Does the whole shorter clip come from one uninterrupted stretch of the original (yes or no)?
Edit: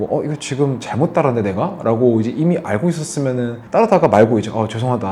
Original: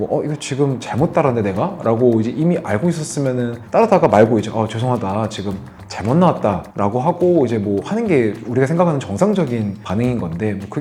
yes